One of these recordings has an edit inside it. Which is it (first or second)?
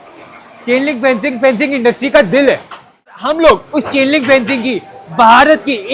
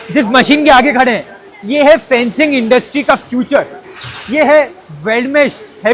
first